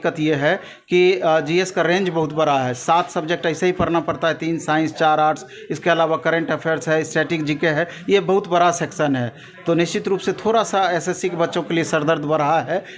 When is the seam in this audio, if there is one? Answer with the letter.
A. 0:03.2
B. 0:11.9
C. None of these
C